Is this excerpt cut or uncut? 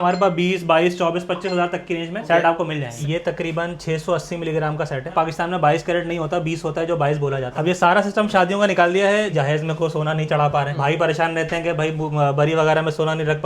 cut